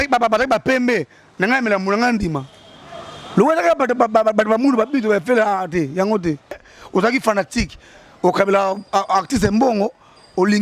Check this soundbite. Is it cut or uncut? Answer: cut